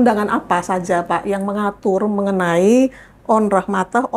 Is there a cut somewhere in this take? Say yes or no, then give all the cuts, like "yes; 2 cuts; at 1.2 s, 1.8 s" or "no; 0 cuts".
no; 0 cuts